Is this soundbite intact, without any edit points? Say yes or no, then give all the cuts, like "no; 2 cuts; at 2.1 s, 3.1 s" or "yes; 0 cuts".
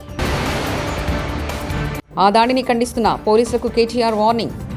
yes; 0 cuts